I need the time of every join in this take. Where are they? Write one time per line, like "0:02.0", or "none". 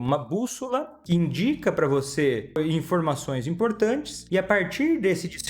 0:00.9
0:02.6
0:04.1